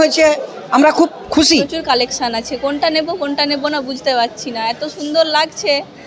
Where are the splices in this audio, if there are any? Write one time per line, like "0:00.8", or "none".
0:01.7

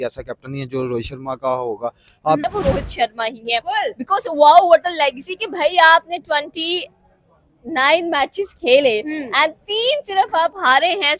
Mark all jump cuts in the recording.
0:02.4

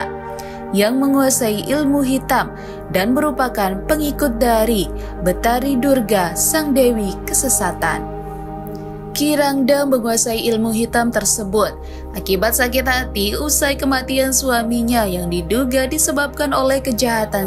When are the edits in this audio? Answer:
none

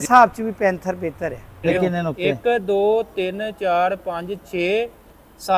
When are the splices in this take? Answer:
0:01.6

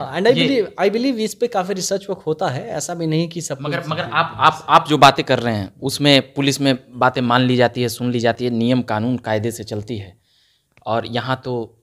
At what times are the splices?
none

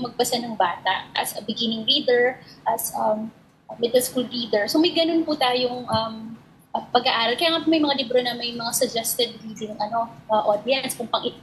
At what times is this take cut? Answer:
none

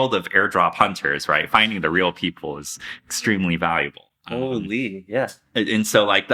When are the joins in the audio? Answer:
none

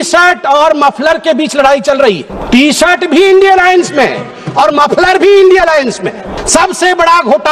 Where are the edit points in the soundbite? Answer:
0:02.3
0:06.4

